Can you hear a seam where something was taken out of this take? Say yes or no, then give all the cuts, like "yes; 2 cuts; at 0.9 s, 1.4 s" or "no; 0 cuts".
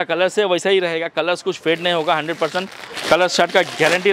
no; 0 cuts